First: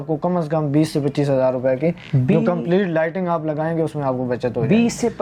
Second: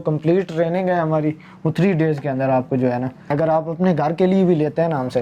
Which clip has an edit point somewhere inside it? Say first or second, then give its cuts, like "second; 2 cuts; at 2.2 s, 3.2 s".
second; 1 cut; at 3.3 s